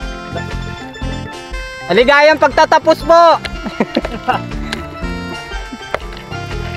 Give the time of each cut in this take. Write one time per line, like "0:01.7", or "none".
none